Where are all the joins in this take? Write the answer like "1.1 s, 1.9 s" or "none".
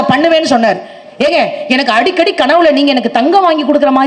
1.0 s